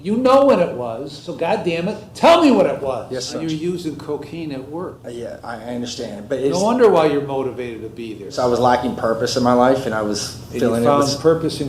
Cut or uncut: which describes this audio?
cut